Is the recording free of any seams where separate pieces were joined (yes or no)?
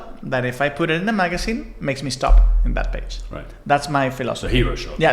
yes